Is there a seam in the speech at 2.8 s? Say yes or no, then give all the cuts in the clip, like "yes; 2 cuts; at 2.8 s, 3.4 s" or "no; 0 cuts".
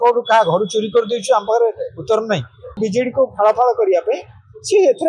yes; 1 cut; at 2.8 s